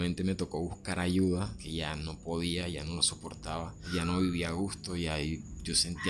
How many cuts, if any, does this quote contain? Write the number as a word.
two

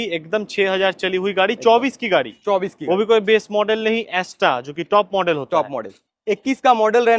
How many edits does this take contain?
one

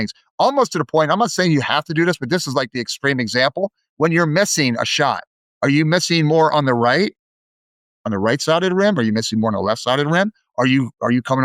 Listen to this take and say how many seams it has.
zero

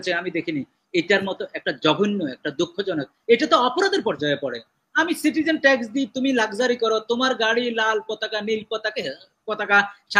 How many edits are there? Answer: zero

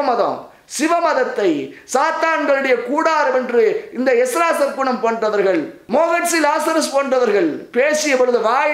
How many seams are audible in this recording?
one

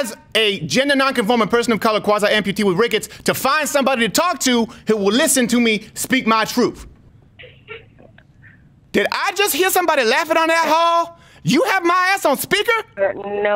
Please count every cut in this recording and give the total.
two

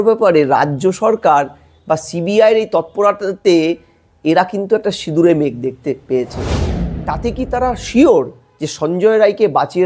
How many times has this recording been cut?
one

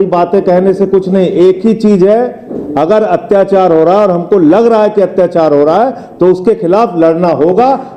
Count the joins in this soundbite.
zero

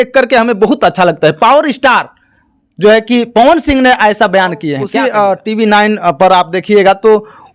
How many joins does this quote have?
one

